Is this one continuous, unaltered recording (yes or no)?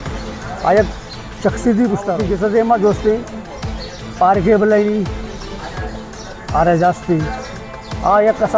no